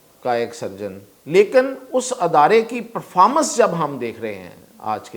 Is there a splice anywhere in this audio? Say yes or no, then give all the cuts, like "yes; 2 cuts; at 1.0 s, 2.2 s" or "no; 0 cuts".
yes; 1 cut; at 1.1 s